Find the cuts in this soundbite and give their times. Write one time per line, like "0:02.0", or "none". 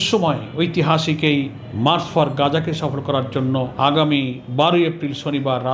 0:01.6
0:03.7
0:04.4